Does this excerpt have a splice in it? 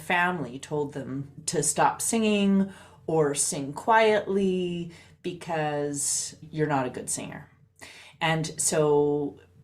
no; 0 cuts

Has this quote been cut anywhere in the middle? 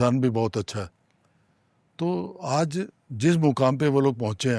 no; 0 cuts

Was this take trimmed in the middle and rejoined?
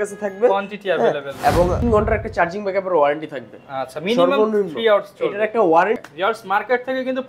yes; 2 cuts; at 1.8 s, 6.1 s

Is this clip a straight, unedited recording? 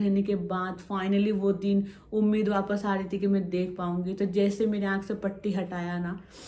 yes; 0 cuts

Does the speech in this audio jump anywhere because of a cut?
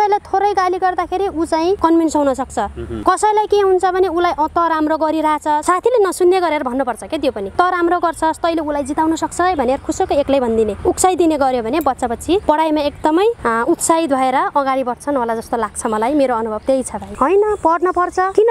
yes; 5 cuts; at 1.8 s, 2.8 s, 5.6 s, 7.4 s, 17.1 s

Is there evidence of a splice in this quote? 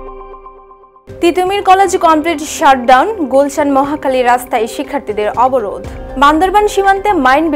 yes; 1 cut; at 1.0 s

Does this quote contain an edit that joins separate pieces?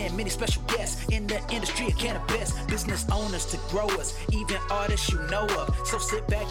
no; 0 cuts

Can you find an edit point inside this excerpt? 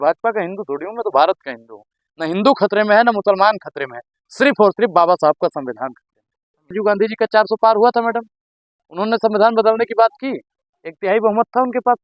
yes; 1 cut; at 6.7 s

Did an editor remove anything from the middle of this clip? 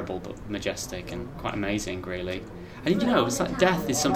yes; 1 cut; at 1.3 s

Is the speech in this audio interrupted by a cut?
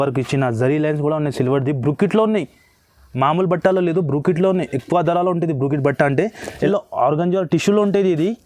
yes; 1 cut; at 6.7 s

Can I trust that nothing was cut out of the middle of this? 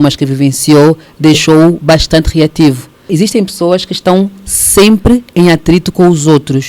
no; 1 cut; at 3.1 s

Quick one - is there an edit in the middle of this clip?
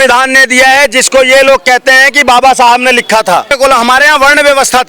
yes; 1 cut; at 3.5 s

